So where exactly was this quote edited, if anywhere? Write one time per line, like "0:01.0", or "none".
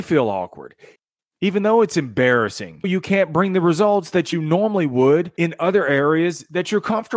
0:01.0
0:02.9
0:05.3